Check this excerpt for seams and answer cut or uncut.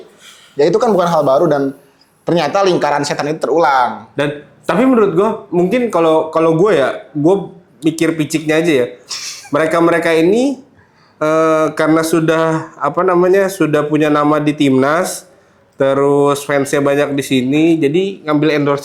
uncut